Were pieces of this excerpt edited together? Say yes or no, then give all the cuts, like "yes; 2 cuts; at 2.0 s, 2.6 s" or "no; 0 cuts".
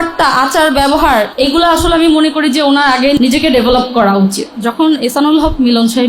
yes; 3 cuts; at 1.3 s, 3.2 s, 4.5 s